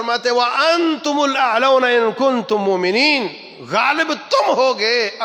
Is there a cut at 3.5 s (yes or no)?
no